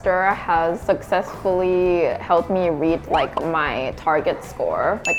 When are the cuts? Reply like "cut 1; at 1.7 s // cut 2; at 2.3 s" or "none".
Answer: none